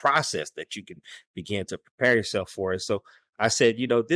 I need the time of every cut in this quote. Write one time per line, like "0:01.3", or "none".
0:03.2